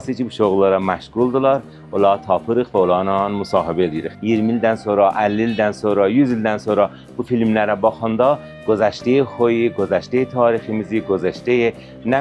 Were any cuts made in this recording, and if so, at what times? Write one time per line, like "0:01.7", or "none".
0:04.1